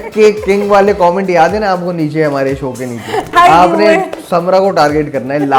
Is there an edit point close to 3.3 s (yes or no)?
yes